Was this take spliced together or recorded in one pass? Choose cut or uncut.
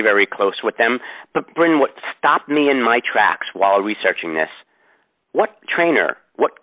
uncut